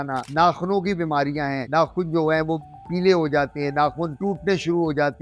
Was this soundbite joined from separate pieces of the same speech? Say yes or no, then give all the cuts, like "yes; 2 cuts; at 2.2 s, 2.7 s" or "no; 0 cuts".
no; 0 cuts